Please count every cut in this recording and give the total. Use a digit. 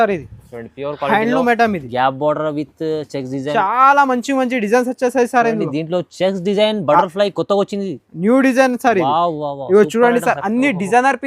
1